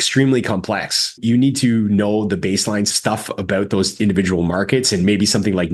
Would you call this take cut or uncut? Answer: cut